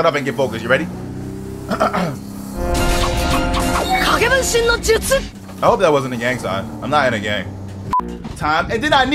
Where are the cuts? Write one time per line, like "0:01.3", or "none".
0:07.9

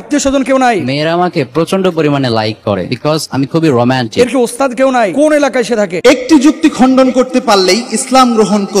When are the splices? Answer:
0:05.9

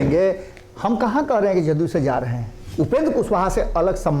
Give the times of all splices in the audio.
0:02.6

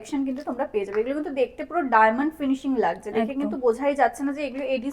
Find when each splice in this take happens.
none

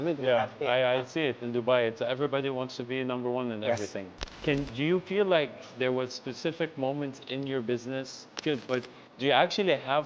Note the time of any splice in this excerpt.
0:04.1
0:08.4

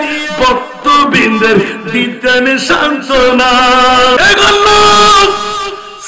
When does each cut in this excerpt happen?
0:04.2

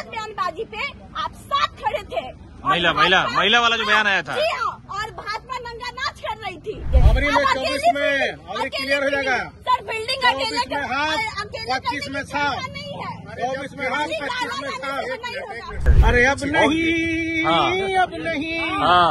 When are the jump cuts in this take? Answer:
0:06.9
0:15.9

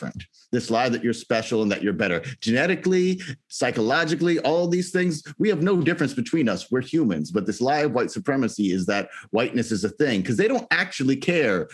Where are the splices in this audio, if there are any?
none

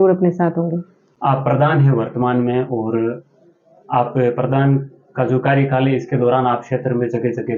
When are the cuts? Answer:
none

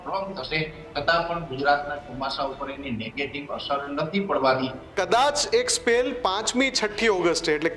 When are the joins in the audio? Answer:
0:04.9

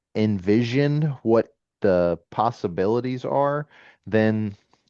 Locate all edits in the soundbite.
none

